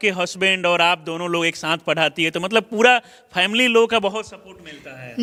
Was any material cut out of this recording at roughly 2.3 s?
no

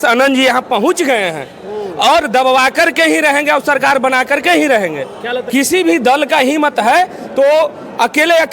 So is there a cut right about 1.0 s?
no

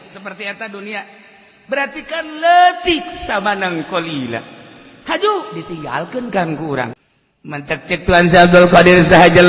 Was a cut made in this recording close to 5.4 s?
no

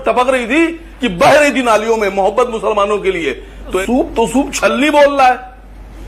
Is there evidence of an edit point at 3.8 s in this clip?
yes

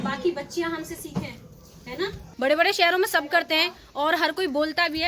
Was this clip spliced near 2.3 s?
yes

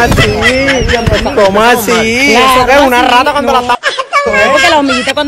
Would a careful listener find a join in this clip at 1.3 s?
no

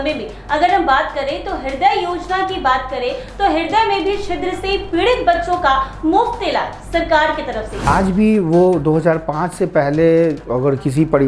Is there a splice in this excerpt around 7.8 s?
yes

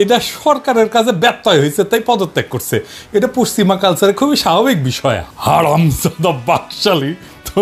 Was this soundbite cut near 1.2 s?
no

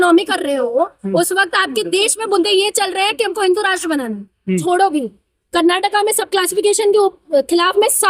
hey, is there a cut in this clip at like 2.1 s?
no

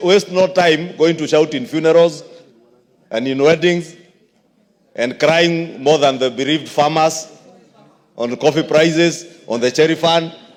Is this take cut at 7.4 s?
no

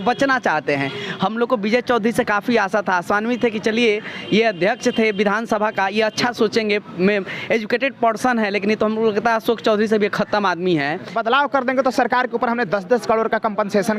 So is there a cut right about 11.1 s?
yes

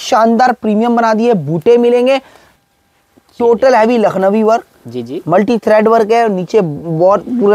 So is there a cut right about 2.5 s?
yes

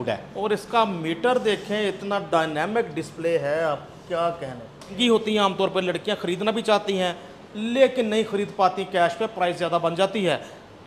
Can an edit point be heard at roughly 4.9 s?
yes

